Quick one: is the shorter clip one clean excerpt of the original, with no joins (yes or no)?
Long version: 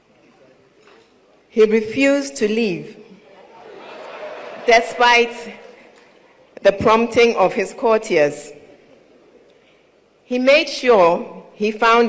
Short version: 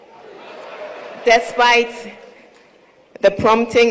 yes